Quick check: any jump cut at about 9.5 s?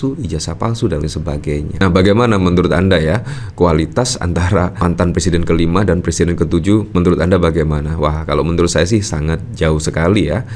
no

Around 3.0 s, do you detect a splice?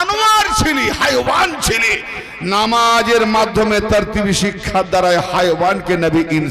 no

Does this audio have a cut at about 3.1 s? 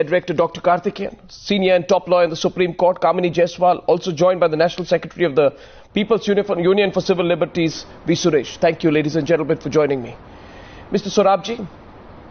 no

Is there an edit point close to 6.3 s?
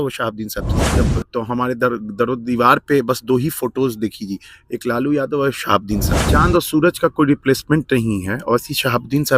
yes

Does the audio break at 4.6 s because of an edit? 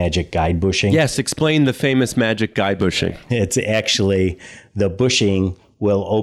no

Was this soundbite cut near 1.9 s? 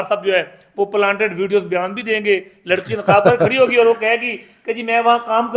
no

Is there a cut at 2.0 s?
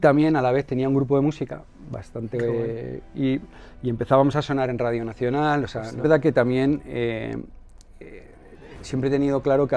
no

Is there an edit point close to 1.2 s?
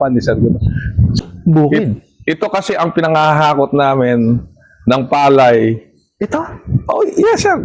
yes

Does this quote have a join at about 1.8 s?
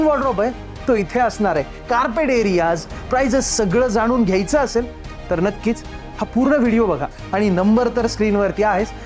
yes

